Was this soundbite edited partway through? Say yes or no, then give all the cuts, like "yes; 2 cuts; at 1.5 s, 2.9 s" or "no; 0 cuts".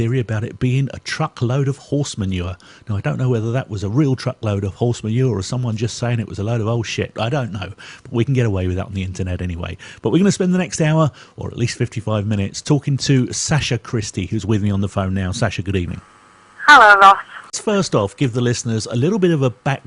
no; 0 cuts